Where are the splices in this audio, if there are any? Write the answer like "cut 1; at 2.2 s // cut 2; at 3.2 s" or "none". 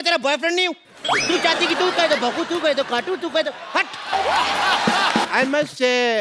cut 1; at 5.3 s